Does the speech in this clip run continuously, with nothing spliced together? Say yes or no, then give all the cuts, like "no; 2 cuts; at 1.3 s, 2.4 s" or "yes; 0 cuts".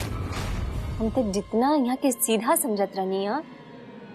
yes; 0 cuts